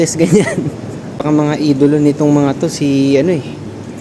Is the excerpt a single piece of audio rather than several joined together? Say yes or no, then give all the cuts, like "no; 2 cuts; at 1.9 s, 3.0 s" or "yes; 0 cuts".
no; 1 cut; at 1.2 s